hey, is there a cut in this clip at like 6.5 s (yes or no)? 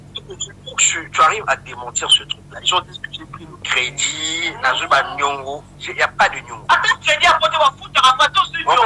yes